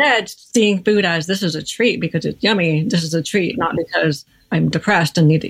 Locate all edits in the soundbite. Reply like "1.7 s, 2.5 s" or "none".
4.3 s